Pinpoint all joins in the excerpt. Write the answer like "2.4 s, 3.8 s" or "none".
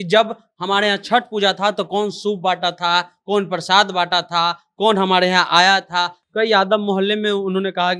6.2 s

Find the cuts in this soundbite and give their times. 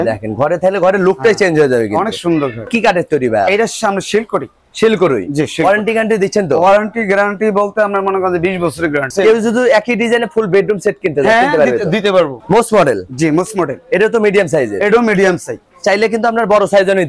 2.6 s, 9.1 s, 12.4 s

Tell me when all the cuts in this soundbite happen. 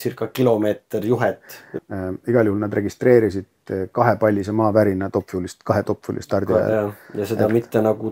1.6 s

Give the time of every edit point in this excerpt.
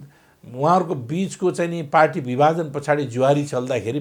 none

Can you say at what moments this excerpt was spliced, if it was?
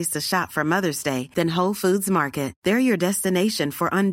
none

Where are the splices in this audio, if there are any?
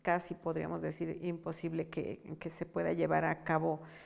none

